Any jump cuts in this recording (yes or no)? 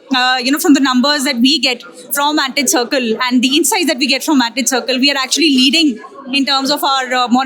no